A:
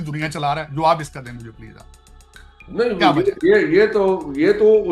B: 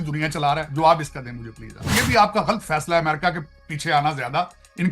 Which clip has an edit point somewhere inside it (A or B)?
B